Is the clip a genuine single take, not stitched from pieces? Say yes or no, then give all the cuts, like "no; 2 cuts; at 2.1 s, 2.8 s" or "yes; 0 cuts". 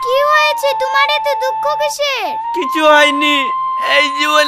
yes; 0 cuts